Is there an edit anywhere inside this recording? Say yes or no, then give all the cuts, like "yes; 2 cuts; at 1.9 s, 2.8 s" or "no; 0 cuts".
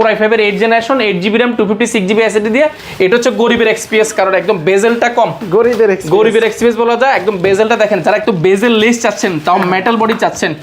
yes; 1 cut; at 2.8 s